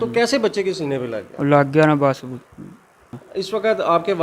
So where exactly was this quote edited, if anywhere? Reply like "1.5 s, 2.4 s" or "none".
3.2 s